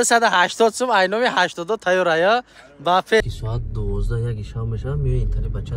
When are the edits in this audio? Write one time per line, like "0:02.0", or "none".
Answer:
0:03.2

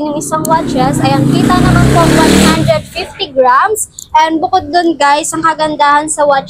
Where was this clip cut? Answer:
none

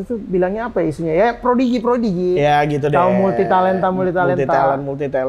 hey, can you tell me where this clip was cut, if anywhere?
none

